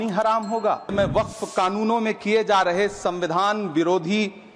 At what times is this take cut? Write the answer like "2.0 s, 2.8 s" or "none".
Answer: 0.9 s